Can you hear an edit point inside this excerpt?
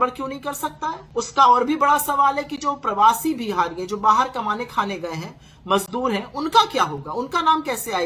yes; 1 cut; at 1.0 s

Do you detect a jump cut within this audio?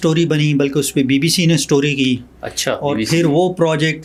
no; 0 cuts

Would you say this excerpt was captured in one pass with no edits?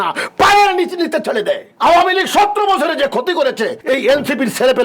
no; 2 cuts; at 1.7 s, 3.8 s

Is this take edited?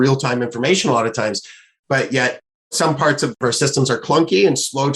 yes; 1 cut; at 3.4 s

